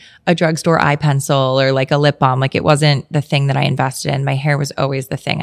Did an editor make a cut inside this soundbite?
no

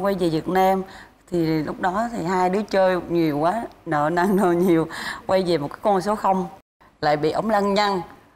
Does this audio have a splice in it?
yes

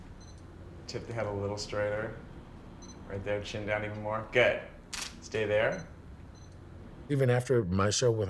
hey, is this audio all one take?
yes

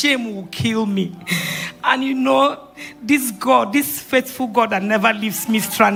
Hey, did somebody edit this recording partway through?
no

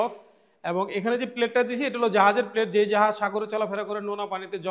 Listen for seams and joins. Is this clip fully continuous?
yes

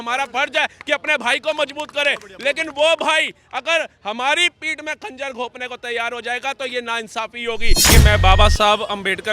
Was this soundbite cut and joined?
yes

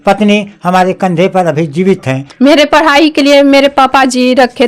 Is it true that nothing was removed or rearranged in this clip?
no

